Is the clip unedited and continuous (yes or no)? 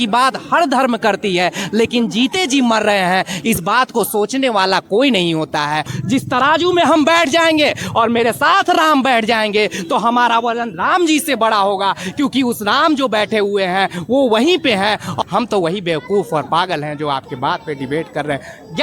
no